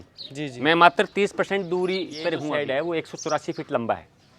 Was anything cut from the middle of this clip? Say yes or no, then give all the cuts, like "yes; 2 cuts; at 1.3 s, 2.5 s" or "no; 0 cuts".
yes; 1 cut; at 2.5 s